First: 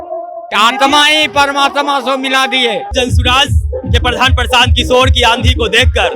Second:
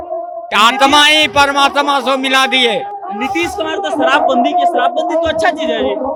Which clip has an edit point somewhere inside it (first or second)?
first